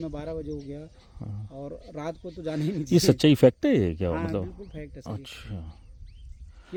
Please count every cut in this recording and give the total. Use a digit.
0